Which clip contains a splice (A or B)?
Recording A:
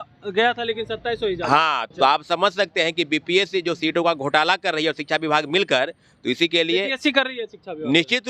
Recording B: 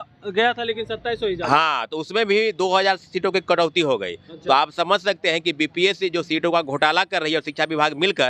A